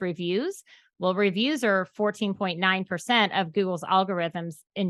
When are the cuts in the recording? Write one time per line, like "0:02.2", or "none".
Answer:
none